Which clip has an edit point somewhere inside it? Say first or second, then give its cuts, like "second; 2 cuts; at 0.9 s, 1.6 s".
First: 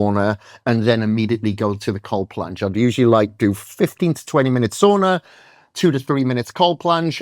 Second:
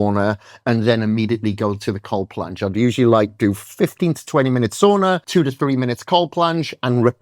second; 1 cut; at 5.2 s